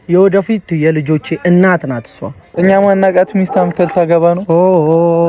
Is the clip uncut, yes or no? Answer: no